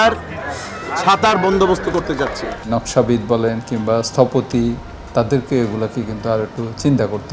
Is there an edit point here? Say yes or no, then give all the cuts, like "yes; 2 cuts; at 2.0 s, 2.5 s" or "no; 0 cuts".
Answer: yes; 1 cut; at 2.6 s